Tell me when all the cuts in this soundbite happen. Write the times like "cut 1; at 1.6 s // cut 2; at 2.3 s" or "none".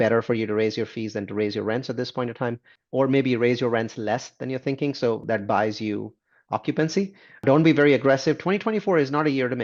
none